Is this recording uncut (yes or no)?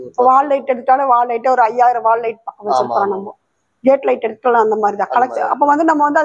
yes